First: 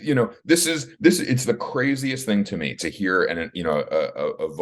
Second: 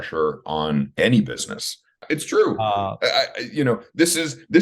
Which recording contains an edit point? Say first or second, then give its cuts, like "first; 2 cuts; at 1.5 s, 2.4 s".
second; 2 cuts; at 0.9 s, 2.0 s